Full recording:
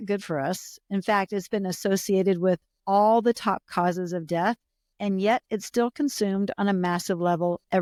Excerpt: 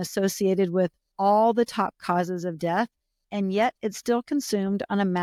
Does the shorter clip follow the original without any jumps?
yes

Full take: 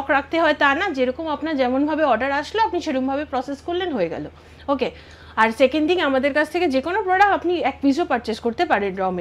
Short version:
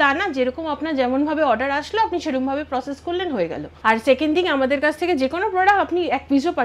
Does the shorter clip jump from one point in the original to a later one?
yes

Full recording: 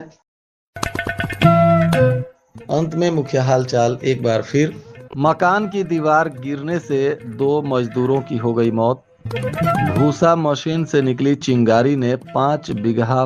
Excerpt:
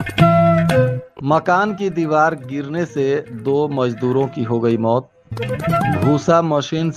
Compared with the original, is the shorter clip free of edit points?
no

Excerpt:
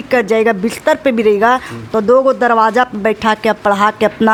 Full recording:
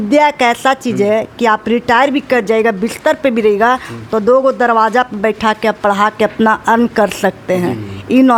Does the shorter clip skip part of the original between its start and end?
no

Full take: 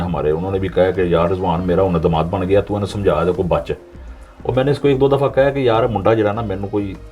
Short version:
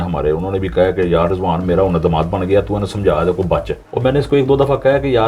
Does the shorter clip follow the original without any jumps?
no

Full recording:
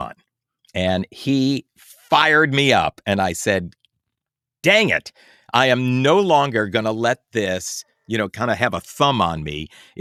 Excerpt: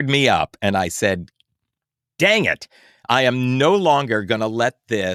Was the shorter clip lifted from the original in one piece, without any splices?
yes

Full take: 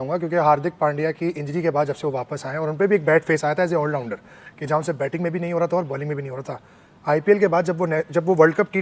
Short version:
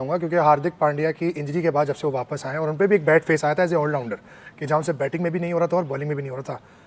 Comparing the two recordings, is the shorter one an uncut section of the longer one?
yes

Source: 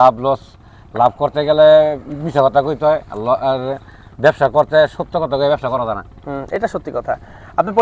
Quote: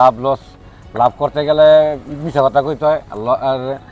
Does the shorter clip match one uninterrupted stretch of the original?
yes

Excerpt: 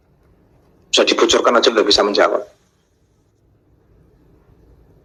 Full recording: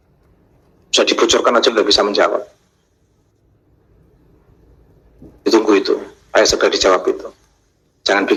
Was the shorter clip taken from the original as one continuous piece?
yes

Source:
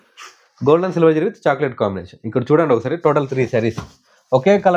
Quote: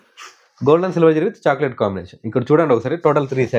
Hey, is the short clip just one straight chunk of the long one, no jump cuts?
yes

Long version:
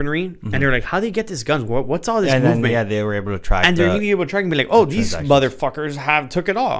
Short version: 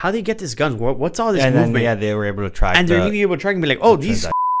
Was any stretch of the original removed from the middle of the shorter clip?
no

